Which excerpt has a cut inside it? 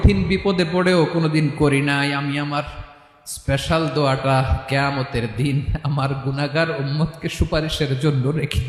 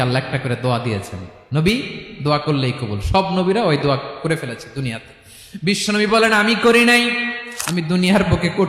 second; 1 cut; at 7.4 s

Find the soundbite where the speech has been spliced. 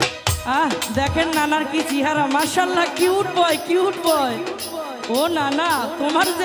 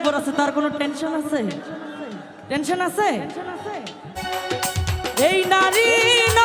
second; 1 cut; at 4.2 s

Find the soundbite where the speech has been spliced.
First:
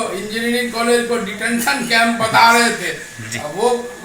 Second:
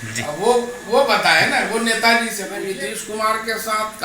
second; 1 cut; at 2.5 s

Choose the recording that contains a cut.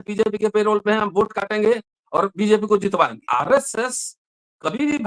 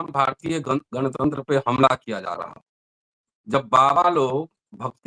first; 1 cut; at 3.2 s

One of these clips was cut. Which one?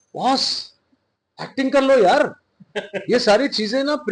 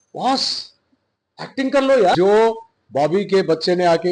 second; 1 cut; at 2.2 s

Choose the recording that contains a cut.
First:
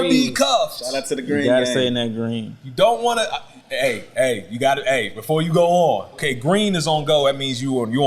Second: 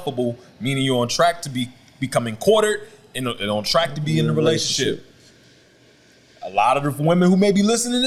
first; 1 cut; at 6.2 s

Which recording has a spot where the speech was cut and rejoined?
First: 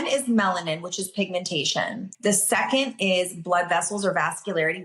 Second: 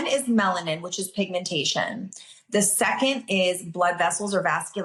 first; 1 cut; at 2.1 s

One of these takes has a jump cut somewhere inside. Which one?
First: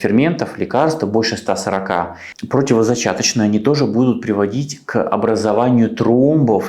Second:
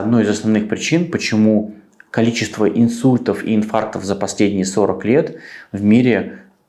first; 1 cut; at 2.3 s

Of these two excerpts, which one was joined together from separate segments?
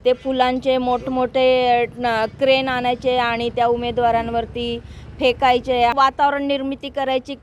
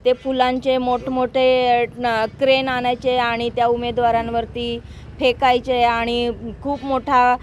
first; 1 cut; at 5.9 s

